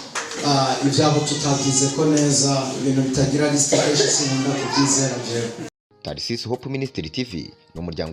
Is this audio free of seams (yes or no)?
no